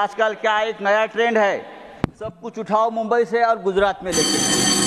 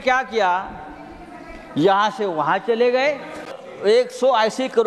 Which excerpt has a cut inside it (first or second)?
second